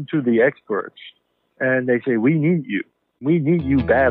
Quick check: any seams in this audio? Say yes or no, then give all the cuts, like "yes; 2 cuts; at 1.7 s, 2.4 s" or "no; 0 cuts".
yes; 1 cut; at 3.2 s